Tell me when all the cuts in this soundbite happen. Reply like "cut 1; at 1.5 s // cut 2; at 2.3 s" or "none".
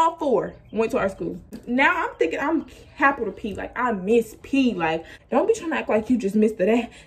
cut 1; at 1.5 s // cut 2; at 5.1 s